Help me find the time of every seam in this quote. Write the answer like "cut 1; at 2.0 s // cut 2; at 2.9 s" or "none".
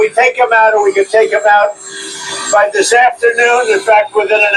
none